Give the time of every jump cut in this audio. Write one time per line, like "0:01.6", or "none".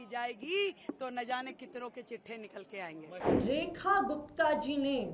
0:03.1

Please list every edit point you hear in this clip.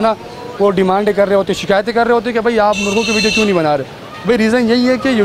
none

